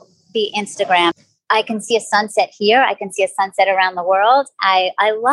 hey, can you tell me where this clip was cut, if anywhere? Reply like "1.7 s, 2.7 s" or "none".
1.1 s

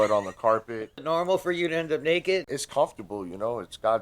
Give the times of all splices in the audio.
1.0 s, 2.5 s

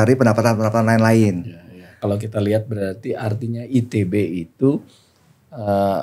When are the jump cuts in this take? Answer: 1.9 s

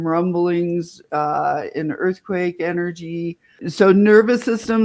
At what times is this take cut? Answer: 3.6 s

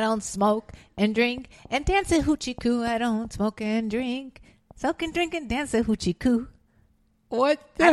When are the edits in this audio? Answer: none

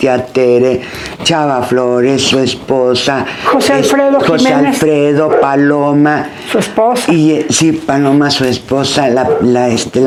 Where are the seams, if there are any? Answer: none

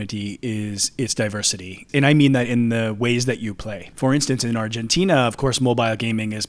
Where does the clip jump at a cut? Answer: 1.9 s, 3.8 s

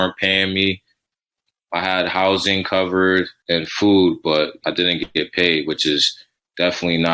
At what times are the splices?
1.3 s, 3.4 s, 4.6 s

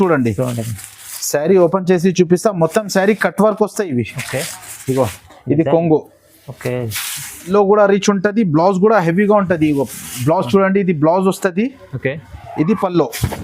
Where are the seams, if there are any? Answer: 7.5 s

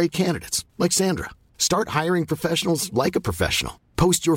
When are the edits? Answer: none

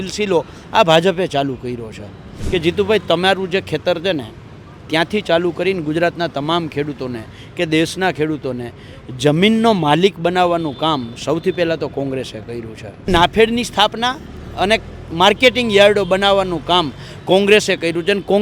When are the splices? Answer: 2.3 s, 13.1 s

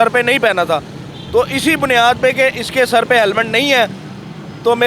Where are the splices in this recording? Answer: none

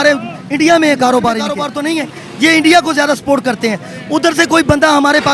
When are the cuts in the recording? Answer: 1.7 s

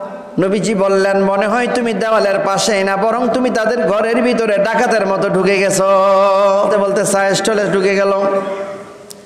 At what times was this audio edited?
6.7 s

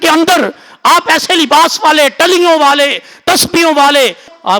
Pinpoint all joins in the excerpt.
none

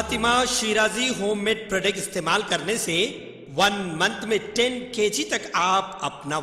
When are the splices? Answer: none

